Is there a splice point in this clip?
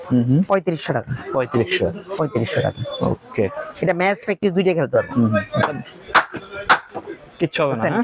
no; 0 cuts

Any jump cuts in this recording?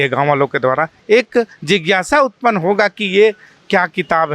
yes; 1 cut; at 1.0 s

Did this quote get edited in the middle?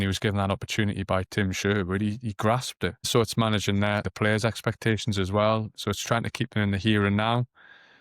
yes; 2 cuts; at 3.1 s, 4.1 s

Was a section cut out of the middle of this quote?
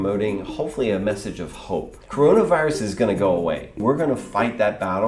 yes; 2 cuts; at 2.0 s, 3.7 s

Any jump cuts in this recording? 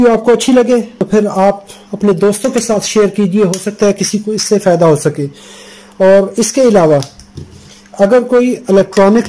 yes; 1 cut; at 0.9 s

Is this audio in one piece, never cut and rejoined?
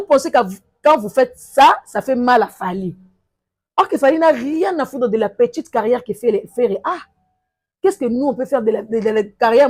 yes; 0 cuts

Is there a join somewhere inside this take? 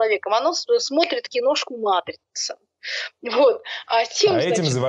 no; 0 cuts

